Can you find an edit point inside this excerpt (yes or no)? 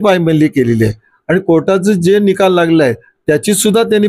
no